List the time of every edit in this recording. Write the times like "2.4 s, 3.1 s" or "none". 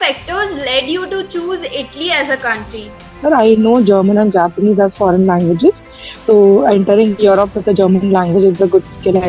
3.1 s